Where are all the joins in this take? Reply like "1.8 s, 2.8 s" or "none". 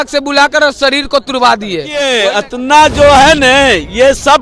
2.1 s